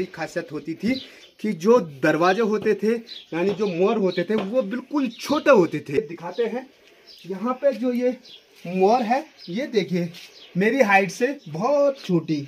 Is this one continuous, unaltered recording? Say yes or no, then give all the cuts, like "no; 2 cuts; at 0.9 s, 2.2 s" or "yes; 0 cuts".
yes; 0 cuts